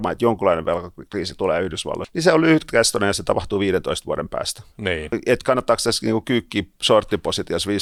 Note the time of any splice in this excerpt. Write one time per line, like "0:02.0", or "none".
none